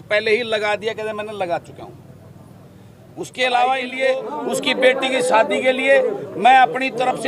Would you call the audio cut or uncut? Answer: cut